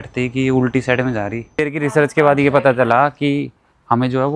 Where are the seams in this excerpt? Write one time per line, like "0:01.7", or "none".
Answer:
0:01.4